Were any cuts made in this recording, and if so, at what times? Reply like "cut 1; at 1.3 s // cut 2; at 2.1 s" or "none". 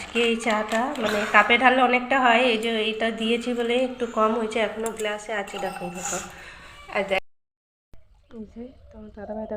cut 1; at 7.2 s